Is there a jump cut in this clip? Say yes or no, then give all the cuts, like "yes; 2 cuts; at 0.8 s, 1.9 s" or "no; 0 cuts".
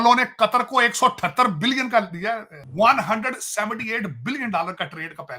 yes; 1 cut; at 2.6 s